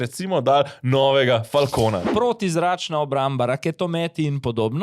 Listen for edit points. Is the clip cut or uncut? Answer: cut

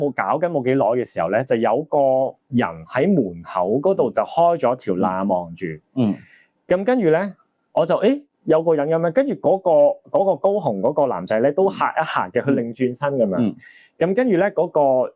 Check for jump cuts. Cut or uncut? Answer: uncut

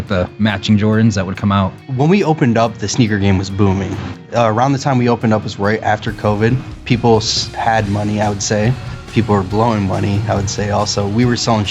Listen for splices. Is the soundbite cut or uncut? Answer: cut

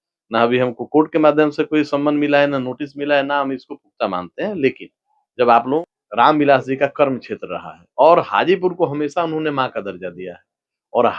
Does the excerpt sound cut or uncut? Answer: cut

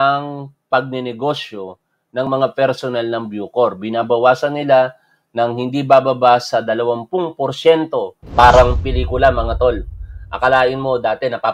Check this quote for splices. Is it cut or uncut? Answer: cut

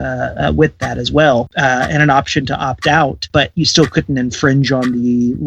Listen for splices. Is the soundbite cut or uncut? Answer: uncut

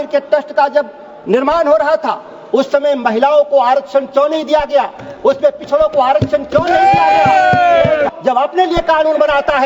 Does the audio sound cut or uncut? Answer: cut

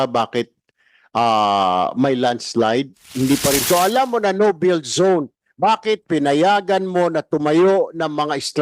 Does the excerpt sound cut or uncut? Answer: cut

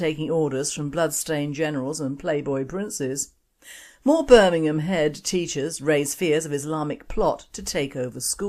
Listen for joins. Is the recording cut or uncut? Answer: cut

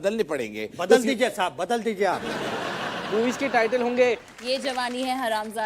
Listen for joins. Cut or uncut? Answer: cut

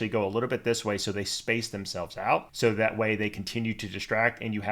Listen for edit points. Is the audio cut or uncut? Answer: cut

